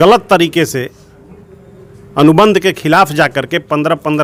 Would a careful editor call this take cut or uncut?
uncut